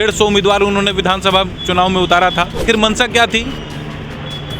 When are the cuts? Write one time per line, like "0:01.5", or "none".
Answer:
0:02.6